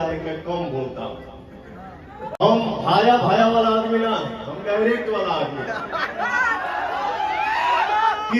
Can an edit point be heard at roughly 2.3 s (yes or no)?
yes